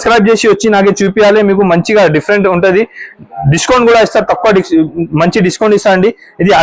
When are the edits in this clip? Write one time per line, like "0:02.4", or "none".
none